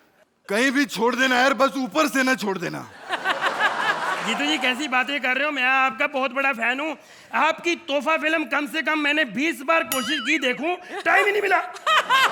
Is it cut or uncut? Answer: uncut